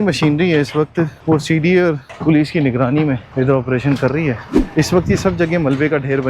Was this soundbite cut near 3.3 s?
yes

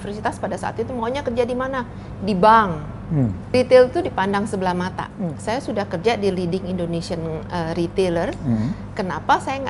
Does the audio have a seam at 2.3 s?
no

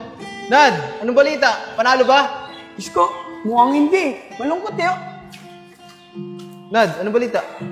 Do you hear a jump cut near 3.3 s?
no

